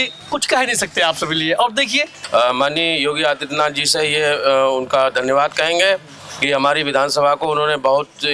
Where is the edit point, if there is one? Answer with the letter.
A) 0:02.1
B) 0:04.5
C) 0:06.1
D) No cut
A